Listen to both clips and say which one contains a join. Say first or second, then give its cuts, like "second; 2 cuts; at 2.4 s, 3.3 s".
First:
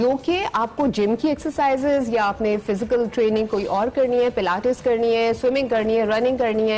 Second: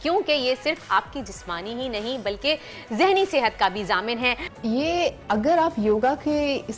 second; 1 cut; at 4.5 s